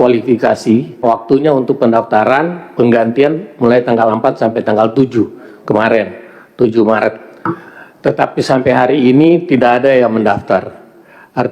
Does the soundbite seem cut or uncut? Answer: cut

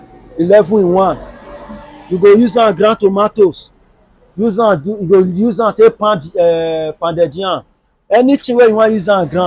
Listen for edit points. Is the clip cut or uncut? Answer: uncut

